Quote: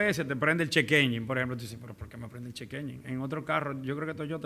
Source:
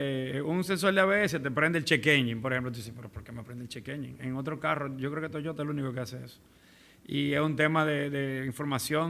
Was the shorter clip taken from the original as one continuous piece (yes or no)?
yes